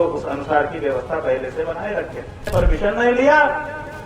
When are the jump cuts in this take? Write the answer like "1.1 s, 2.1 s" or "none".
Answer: 2.5 s